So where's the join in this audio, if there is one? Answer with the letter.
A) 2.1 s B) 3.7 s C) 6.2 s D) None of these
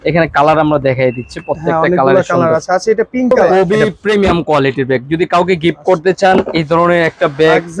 B